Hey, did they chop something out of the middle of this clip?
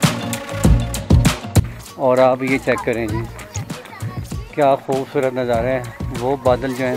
yes; 1 cut; at 1.7 s

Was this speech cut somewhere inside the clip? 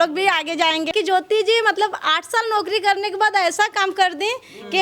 yes; 1 cut; at 0.9 s

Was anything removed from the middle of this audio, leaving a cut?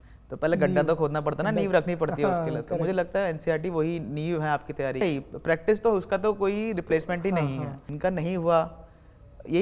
yes; 2 cuts; at 5.0 s, 7.9 s

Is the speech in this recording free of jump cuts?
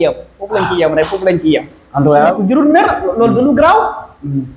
no; 1 cut; at 2.3 s

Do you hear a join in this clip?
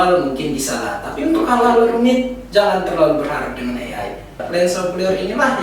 yes; 1 cut; at 4.4 s

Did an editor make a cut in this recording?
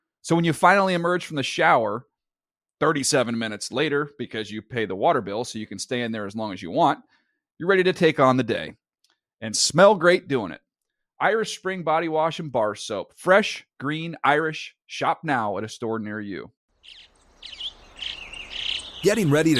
yes; 1 cut; at 16.5 s

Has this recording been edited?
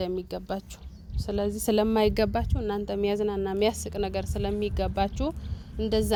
no; 0 cuts

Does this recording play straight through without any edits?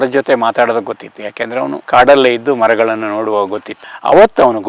yes; 0 cuts

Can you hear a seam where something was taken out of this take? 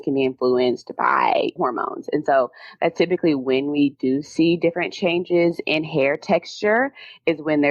yes; 1 cut; at 1.5 s

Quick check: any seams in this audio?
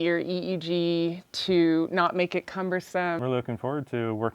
yes; 1 cut; at 3.2 s

